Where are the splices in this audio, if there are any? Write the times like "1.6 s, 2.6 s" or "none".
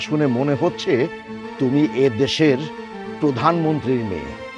none

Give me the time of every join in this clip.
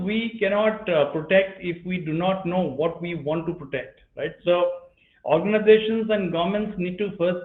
none

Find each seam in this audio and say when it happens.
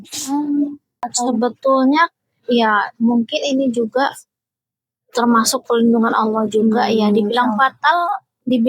1.0 s

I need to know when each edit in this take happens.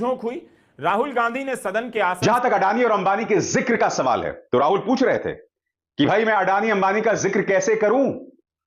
2.2 s

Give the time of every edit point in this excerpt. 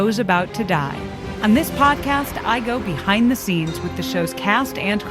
1.2 s

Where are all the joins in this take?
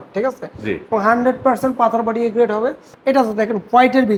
none

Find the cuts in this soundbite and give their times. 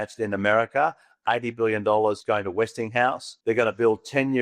2.2 s, 3.3 s

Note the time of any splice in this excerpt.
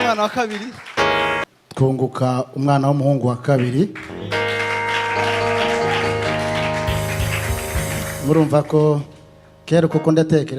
1.5 s

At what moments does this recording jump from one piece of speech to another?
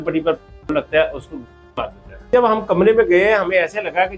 2.3 s

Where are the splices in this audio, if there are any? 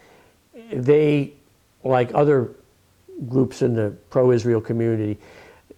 none

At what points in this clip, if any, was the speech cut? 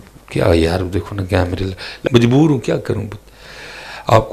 2.0 s

